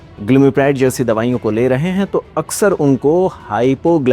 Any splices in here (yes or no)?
no